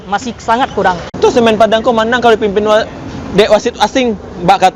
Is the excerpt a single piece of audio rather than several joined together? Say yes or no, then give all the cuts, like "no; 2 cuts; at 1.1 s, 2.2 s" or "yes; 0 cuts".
no; 1 cut; at 1.2 s